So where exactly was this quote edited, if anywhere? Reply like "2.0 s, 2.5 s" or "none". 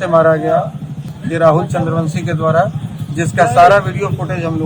1.1 s